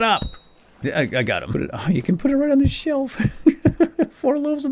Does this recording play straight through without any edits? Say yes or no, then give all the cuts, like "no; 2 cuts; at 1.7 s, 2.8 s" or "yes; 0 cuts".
no; 1 cut; at 1.5 s